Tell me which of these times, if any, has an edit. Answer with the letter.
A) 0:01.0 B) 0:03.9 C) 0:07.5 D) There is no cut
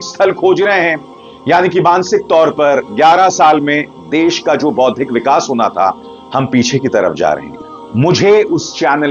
C